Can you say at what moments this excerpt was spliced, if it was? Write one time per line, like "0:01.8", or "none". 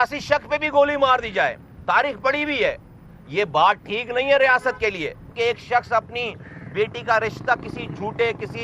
0:05.3